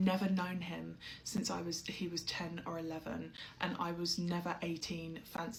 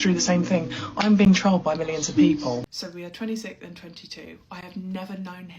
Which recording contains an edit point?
second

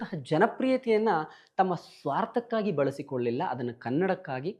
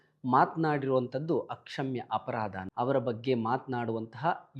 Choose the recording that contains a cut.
second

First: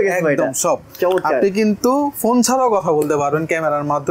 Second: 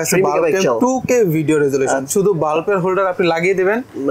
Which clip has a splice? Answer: second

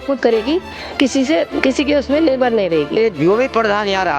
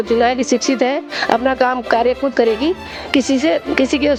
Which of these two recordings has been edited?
first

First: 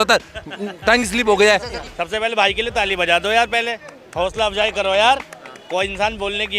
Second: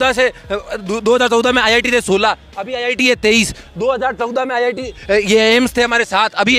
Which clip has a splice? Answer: first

